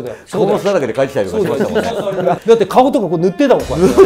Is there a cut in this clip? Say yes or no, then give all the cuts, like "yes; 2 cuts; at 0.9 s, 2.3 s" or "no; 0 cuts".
yes; 1 cut; at 1.9 s